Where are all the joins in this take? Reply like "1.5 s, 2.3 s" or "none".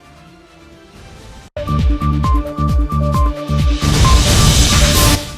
1.3 s